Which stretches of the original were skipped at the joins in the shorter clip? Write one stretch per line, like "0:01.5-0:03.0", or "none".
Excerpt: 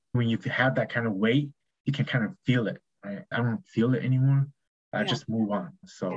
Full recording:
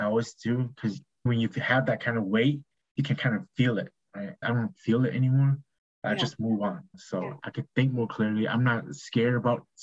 none